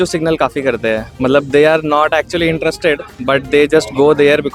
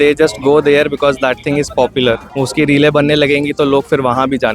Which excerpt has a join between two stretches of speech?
second; 1 cut; at 2.3 s

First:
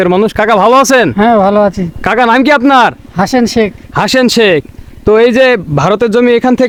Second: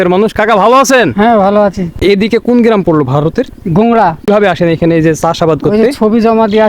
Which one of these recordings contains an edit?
second; 2 cuts; at 1.9 s, 4.3 s

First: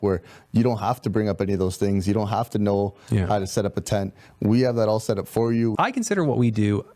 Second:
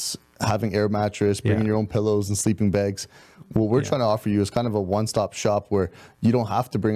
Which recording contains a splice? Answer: first; 1 cut; at 5.7 s

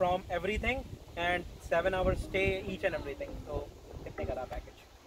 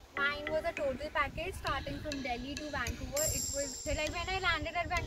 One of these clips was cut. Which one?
second; 1 cut; at 3.8 s

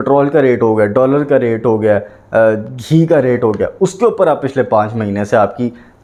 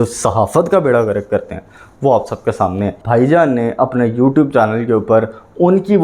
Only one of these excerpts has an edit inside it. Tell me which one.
second; 1 cut; at 3.0 s

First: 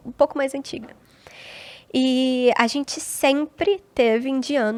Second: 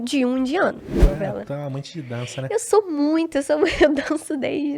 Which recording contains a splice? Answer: second; 1 cut; at 0.9 s

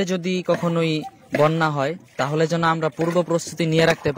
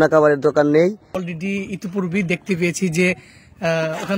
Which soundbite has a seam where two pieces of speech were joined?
second; 1 cut; at 1.2 s

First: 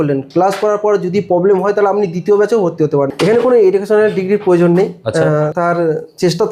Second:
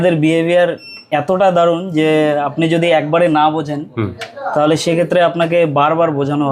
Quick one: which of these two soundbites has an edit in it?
first; 2 cuts; at 3.2 s, 5.5 s

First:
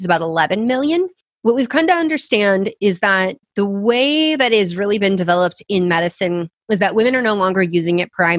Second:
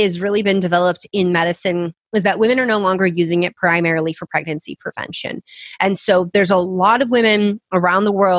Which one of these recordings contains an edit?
first; 2 cuts; at 1.2 s, 3.4 s

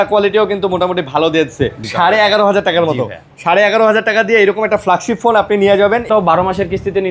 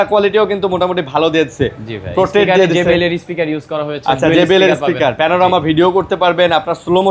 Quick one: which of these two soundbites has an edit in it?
first; 2 cuts; at 1.8 s, 6.1 s

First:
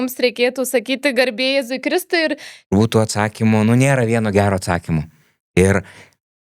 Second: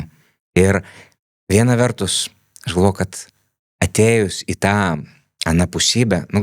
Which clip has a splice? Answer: first; 1 cut; at 2.7 s

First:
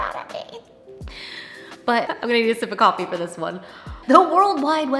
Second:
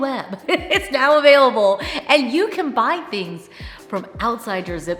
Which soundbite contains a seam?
first; 2 cuts; at 2.1 s, 3.9 s

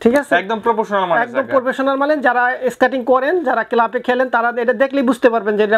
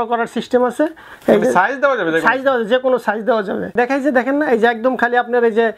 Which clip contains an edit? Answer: second; 1 cut; at 3.7 s

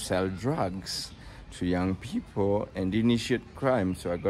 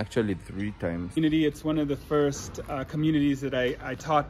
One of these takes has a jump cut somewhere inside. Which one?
second; 1 cut; at 1.2 s

